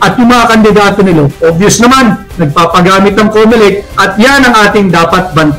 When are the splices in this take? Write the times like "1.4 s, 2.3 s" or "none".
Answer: 1.3 s